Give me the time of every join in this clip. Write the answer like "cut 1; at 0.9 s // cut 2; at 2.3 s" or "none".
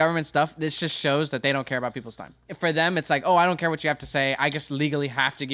cut 1; at 2.5 s